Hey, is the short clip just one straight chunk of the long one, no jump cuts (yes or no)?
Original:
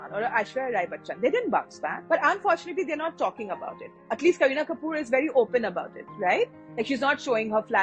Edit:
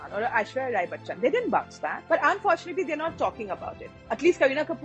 yes